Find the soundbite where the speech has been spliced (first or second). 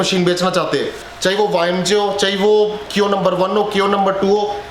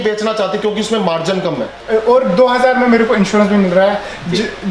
second